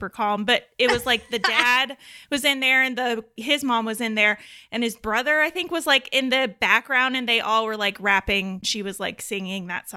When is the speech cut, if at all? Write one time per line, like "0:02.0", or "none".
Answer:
0:08.7